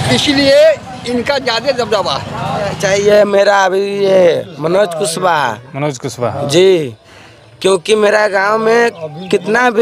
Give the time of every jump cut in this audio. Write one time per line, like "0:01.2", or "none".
0:02.8